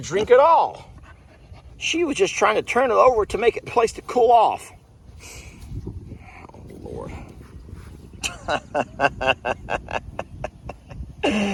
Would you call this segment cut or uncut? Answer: uncut